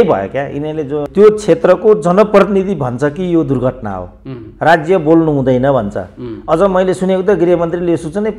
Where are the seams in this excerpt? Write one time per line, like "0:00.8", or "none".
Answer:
0:01.0